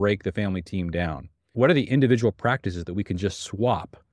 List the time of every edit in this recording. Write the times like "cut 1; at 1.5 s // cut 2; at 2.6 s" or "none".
cut 1; at 1.4 s